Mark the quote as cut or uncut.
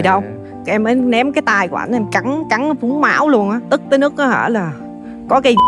uncut